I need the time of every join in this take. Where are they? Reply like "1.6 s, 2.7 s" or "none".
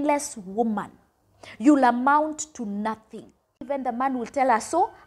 3.6 s